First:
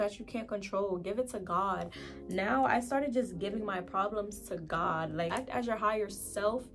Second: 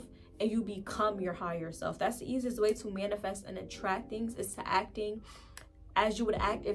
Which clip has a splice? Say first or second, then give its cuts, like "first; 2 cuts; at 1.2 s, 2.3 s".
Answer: first; 1 cut; at 5.3 s